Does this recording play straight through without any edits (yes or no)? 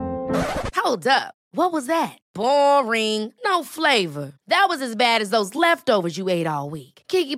yes